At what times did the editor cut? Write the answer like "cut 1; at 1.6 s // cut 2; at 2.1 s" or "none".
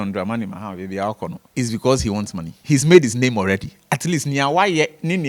cut 1; at 1.4 s // cut 2; at 2.5 s

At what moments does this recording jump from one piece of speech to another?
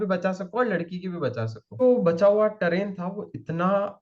cut 1; at 1.8 s

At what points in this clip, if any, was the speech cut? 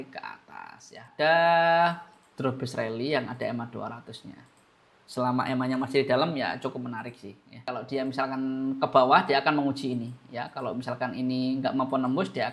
cut 1; at 1.1 s // cut 2; at 7.7 s

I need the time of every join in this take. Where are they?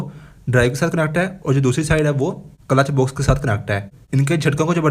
cut 1; at 4.0 s

